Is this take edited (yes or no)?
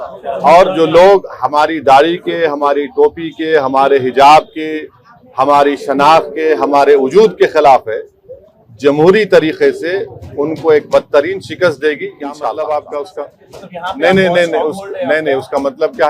yes